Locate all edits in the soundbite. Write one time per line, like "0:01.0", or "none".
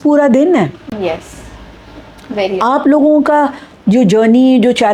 none